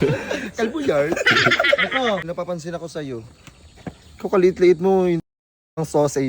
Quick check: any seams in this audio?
yes; 1 cut; at 2.3 s

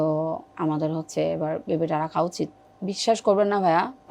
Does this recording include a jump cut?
yes; 1 cut; at 2.7 s

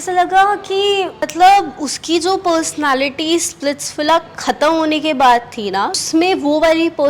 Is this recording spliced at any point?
yes; 1 cut; at 6.0 s

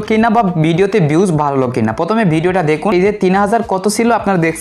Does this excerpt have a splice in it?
yes; 1 cut; at 2.9 s

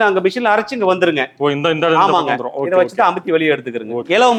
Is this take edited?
no; 0 cuts

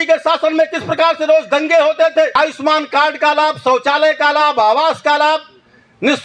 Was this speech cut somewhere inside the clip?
yes; 1 cut; at 2.3 s

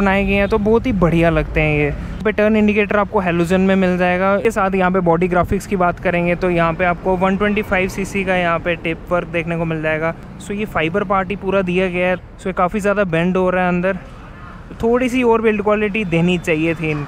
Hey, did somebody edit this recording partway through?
no; 0 cuts

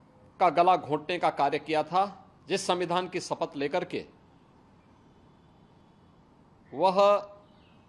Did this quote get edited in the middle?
yes; 1 cut; at 2.3 s

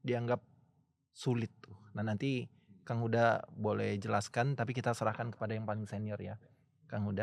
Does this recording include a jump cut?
no; 0 cuts

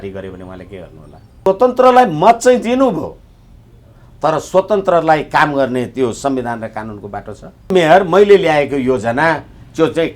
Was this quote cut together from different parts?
yes; 2 cuts; at 1.4 s, 7.7 s

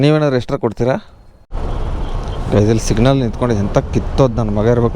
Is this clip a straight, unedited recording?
no; 1 cut; at 1.5 s

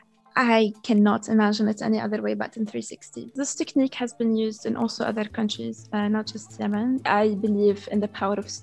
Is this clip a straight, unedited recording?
no; 2 cuts; at 3.3 s, 7.0 s

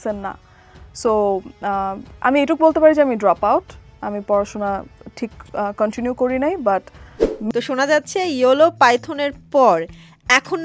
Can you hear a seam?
yes; 1 cut; at 7.5 s

